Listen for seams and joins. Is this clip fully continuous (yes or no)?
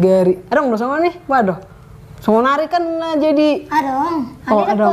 yes